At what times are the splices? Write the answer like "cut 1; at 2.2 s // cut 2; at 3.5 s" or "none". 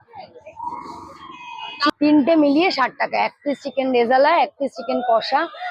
cut 1; at 1.9 s